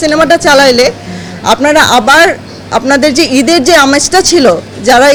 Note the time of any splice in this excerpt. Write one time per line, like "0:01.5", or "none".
none

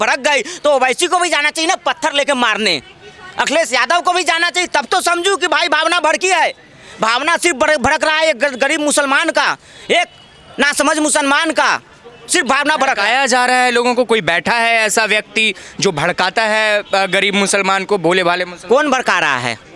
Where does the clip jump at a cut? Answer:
none

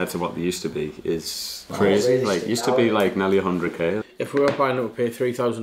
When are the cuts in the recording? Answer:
0:01.7
0:04.0

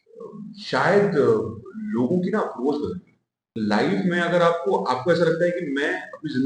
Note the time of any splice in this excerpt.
0:03.5

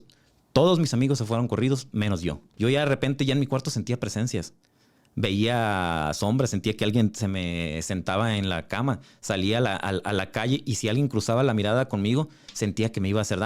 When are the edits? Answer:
0:02.4

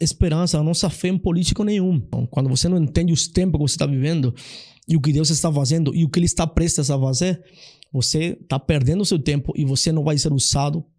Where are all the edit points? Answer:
0:02.2

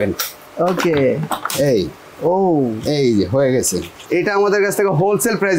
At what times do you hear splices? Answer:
0:03.9

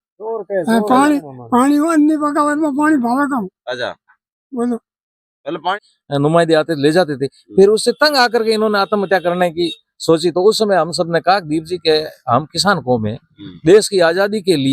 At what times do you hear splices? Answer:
0:05.8

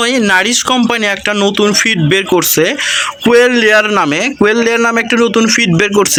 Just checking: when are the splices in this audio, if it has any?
none

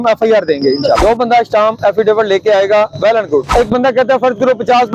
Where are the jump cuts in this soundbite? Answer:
0:01.0
0:03.5

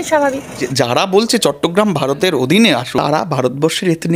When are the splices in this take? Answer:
0:00.8
0:02.9

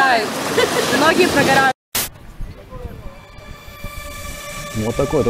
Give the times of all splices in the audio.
0:01.7
0:04.3

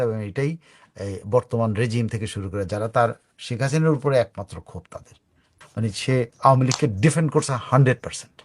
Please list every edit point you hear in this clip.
0:05.5

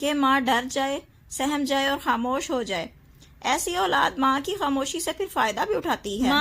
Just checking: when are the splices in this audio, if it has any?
none

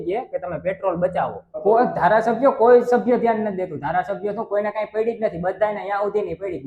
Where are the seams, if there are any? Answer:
0:01.4

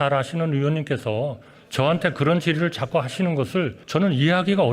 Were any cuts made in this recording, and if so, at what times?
0:03.8

